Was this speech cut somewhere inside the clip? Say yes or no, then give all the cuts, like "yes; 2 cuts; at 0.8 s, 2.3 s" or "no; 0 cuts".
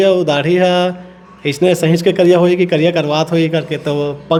no; 0 cuts